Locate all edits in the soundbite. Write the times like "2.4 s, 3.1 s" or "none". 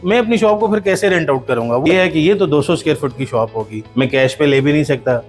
1.8 s, 3.8 s